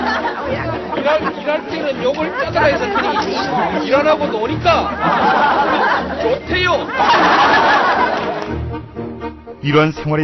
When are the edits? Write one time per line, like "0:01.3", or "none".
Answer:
none